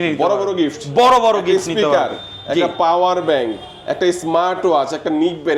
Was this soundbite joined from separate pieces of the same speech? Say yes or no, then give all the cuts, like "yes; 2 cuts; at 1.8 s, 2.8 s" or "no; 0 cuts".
no; 0 cuts